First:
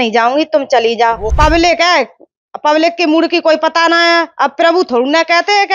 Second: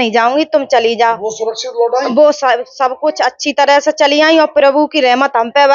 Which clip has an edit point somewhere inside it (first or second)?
first